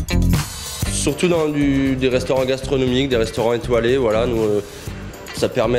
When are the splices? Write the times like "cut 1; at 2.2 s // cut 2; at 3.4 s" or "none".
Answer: none